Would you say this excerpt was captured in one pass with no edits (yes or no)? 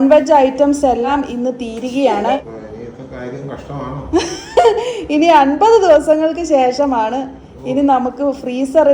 no